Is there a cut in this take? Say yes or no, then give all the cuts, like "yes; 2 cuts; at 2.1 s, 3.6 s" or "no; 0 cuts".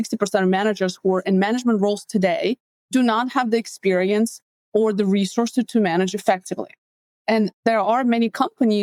no; 0 cuts